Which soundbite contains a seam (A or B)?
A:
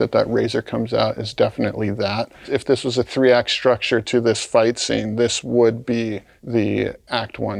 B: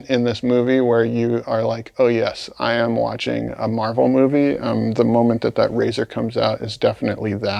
A